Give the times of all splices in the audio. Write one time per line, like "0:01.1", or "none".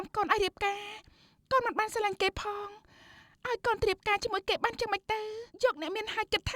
0:05.4